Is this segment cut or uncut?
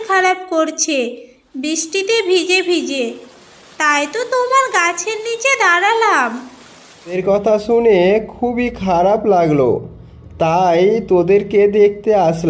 cut